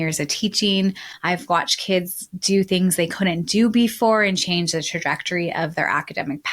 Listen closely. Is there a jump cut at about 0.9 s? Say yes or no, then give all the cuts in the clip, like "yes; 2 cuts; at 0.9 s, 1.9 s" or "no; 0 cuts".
yes; 1 cut; at 0.9 s